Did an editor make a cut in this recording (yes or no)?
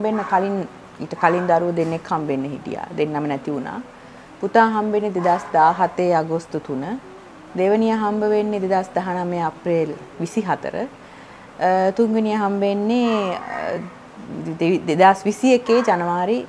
no